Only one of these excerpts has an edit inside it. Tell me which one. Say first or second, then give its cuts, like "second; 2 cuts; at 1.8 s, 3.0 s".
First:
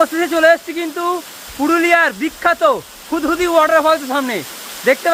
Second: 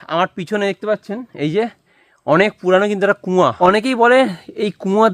second; 1 cut; at 3.5 s